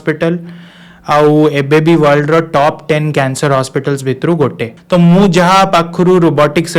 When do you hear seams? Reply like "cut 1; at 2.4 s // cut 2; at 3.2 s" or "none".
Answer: cut 1; at 4.7 s